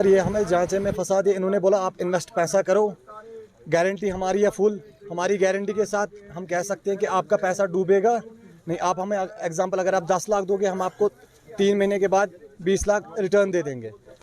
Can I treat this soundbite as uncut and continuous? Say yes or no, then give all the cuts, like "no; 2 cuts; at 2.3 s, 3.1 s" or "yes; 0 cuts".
yes; 0 cuts